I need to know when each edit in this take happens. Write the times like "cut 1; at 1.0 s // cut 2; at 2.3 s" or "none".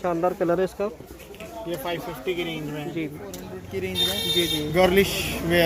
cut 1; at 3.6 s